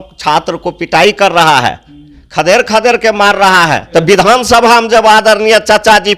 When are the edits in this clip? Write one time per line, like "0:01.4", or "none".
0:03.8